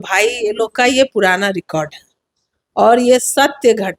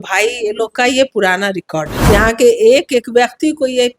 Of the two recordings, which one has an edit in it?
second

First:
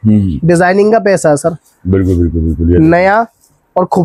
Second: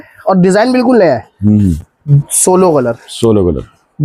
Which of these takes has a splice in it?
second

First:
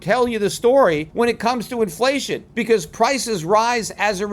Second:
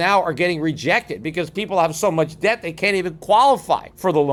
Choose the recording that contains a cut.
first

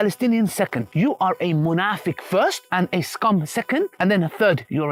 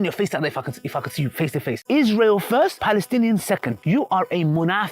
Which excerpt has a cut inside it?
second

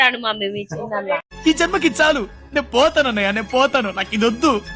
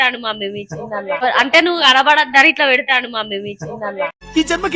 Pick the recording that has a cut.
first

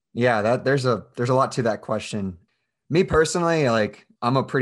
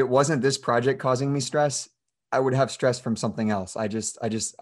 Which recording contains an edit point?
first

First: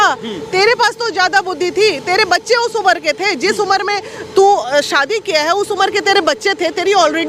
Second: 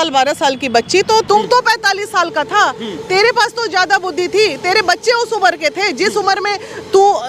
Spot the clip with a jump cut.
second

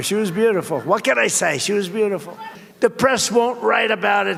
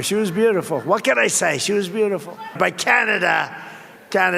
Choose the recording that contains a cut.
second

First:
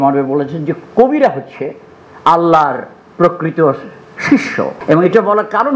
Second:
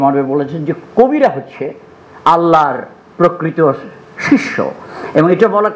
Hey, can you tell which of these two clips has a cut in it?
first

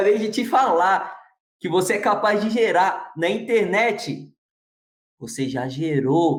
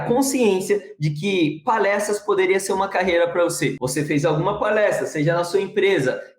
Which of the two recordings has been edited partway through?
second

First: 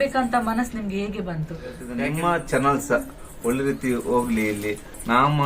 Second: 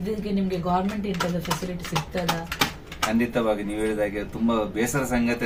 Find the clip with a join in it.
first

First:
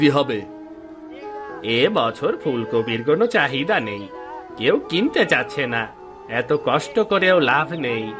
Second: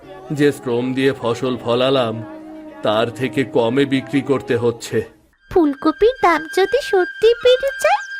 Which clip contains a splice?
second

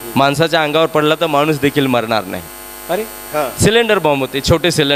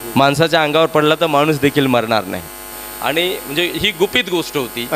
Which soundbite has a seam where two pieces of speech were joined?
second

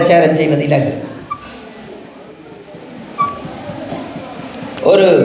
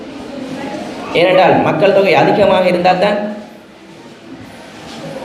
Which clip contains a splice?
first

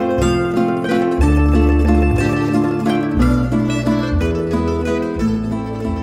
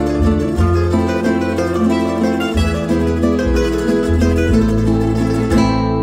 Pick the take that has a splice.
first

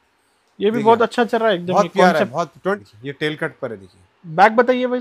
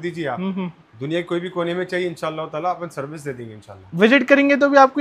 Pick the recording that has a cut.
first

